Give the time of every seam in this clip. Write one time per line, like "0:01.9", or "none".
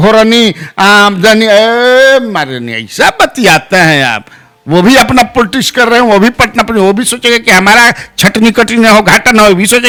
none